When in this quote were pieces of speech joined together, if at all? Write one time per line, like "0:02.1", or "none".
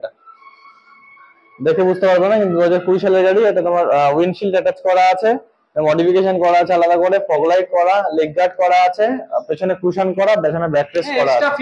none